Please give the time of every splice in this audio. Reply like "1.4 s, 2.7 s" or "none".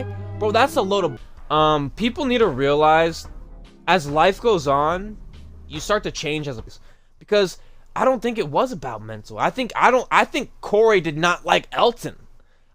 1.2 s, 6.8 s